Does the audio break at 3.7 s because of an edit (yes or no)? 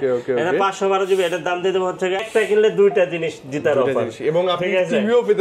no